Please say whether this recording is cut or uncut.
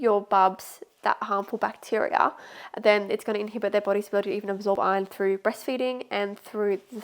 uncut